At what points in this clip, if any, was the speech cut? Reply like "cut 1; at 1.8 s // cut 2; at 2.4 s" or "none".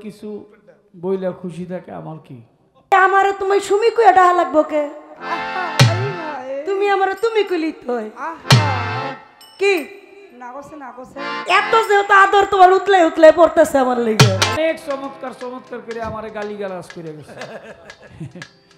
cut 1; at 2.9 s // cut 2; at 14.6 s